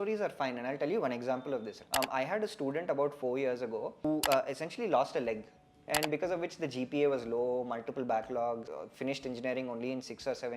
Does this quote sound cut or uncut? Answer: cut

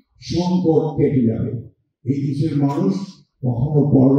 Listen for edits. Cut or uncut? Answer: uncut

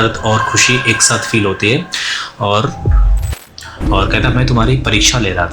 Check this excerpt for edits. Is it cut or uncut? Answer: cut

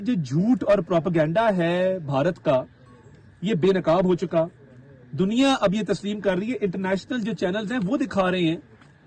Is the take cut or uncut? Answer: uncut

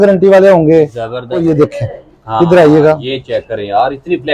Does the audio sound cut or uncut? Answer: cut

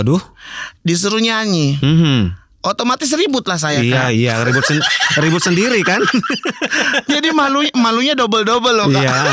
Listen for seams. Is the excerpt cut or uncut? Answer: uncut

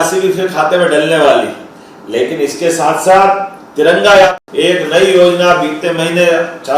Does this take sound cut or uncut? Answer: cut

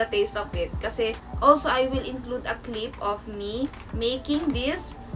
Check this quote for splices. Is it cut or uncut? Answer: cut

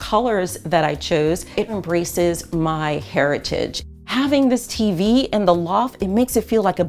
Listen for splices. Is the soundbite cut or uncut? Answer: cut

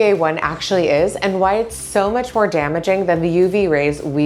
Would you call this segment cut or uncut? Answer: uncut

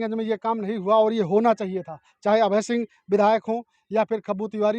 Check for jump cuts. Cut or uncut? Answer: uncut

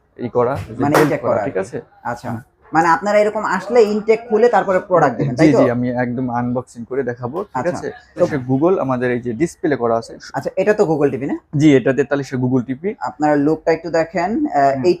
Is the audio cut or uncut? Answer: cut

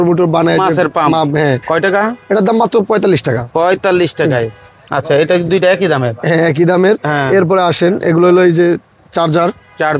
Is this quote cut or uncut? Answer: uncut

